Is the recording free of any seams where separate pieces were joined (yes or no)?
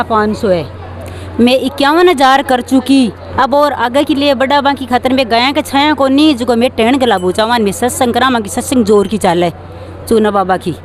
yes